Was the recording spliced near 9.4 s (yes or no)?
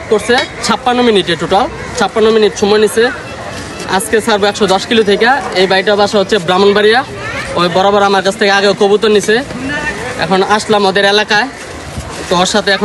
no